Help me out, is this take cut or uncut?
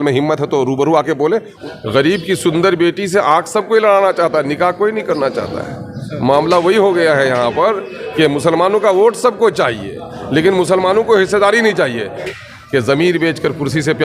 cut